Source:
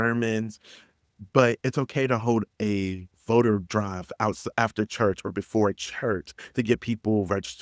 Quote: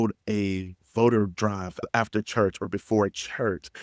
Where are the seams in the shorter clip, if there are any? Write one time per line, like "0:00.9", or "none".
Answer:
0:01.8